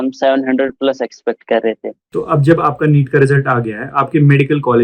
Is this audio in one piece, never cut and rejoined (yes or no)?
no